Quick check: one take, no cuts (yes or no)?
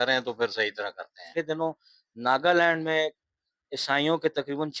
no